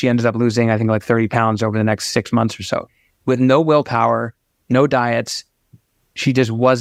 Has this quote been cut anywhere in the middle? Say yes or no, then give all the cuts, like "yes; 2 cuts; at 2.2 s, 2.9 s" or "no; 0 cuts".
no; 0 cuts